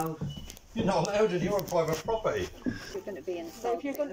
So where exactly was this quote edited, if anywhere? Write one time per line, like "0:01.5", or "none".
0:02.8